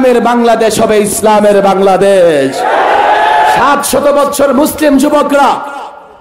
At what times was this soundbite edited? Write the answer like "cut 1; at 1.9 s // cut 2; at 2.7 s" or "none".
cut 1; at 3.6 s